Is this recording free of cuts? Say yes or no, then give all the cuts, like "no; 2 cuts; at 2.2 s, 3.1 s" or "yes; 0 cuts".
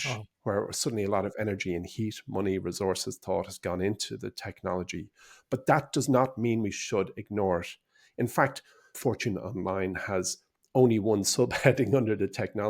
no; 1 cut; at 8.9 s